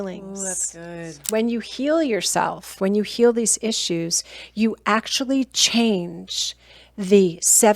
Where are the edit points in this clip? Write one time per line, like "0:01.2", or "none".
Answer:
0:01.3